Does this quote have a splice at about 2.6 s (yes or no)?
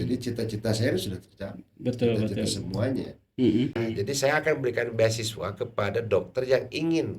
no